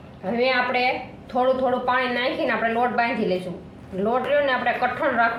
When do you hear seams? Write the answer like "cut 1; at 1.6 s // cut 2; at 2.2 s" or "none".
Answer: none